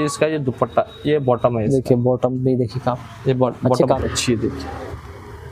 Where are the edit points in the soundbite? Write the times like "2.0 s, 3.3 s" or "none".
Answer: 4.0 s

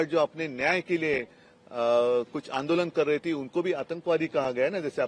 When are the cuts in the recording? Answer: none

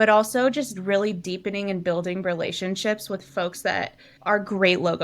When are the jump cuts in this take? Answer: 4.0 s

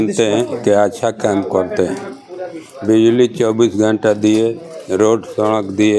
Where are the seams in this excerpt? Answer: none

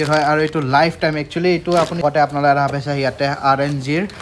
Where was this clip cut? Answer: 1.9 s

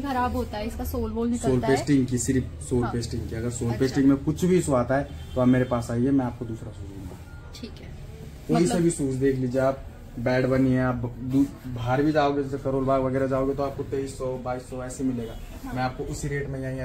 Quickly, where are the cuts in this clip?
none

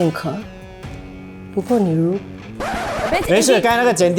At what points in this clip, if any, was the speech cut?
none

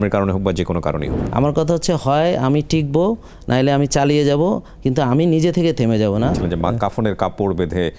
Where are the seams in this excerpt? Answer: 1.2 s, 6.4 s

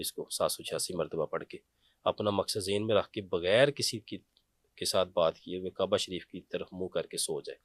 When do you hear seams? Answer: none

